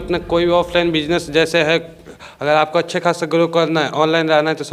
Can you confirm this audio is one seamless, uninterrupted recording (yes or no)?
yes